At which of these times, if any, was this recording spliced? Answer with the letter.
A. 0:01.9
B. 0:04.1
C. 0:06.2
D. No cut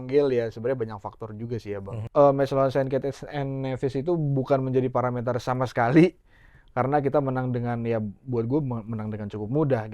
A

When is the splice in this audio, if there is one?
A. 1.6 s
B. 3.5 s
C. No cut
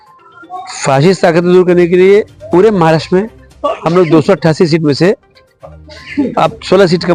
C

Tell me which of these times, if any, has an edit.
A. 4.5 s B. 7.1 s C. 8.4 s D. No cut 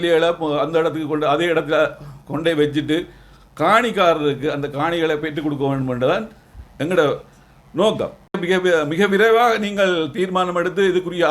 C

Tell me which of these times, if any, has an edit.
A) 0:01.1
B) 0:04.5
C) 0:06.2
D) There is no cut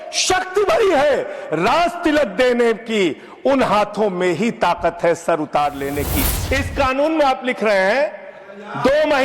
C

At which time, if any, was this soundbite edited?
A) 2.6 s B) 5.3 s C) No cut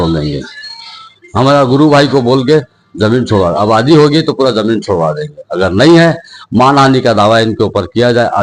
C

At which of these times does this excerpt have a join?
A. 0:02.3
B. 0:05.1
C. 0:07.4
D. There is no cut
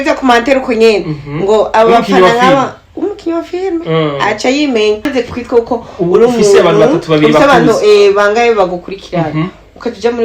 B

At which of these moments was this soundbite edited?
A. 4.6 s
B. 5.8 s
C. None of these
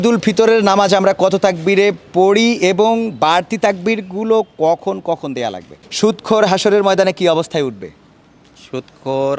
B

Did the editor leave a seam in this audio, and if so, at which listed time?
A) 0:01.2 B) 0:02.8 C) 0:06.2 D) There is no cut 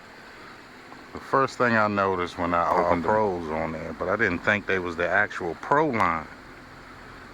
B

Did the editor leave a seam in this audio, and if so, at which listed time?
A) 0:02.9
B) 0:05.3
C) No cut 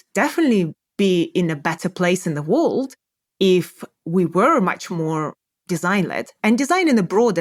C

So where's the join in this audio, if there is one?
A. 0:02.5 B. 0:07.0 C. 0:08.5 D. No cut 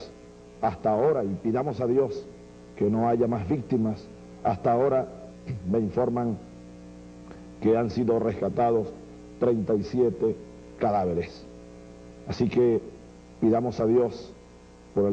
C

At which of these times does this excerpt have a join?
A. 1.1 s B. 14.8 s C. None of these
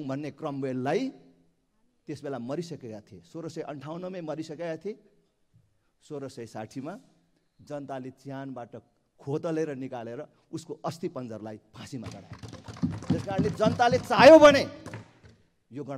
C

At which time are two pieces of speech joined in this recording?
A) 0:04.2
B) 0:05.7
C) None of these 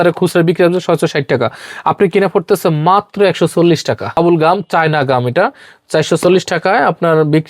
A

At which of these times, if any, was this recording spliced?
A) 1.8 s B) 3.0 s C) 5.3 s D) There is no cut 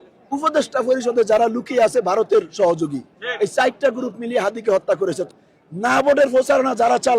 C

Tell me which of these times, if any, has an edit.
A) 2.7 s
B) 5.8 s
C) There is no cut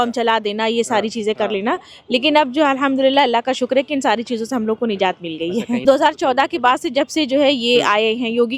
B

